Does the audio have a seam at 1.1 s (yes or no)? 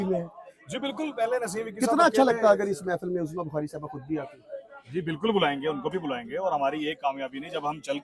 no